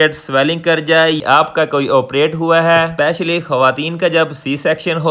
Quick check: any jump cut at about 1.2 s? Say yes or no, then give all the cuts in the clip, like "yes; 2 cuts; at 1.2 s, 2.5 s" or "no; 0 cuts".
yes; 1 cut; at 1.2 s